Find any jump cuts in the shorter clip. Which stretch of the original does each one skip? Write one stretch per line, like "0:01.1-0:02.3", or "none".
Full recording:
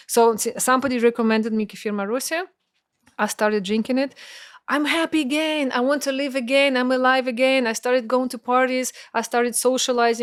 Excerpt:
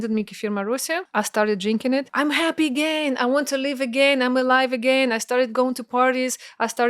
0:02.5-0:03.1
0:04.1-0:04.6